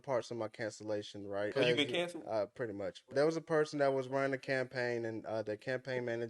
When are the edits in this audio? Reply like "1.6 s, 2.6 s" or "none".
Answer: 1.5 s, 3.1 s

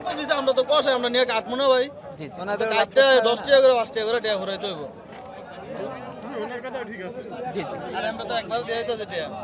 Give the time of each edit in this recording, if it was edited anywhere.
none

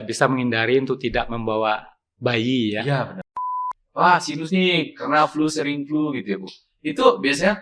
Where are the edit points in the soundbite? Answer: 3.4 s

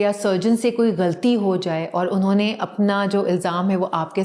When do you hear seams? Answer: none

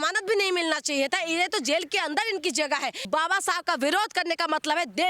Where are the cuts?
3.1 s

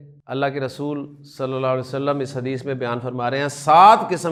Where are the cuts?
none

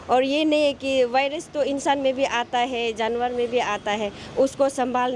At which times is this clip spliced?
none

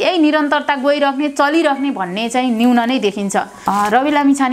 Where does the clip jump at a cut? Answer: 3.6 s

